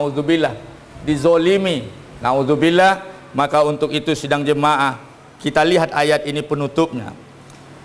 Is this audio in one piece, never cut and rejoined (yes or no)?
yes